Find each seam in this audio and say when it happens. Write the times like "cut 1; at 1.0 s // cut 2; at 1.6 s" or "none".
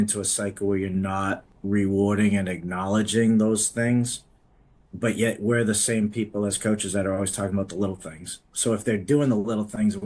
cut 1; at 1.5 s

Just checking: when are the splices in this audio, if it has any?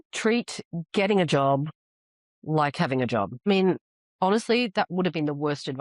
cut 1; at 3.5 s

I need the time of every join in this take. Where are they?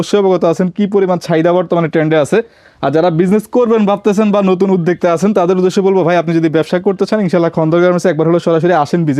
none

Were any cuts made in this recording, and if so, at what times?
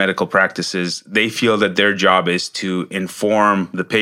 none

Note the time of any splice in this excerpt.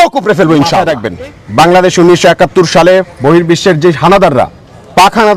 cut 1; at 1.0 s

